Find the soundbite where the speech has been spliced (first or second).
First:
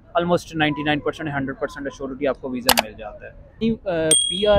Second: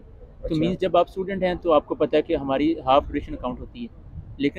first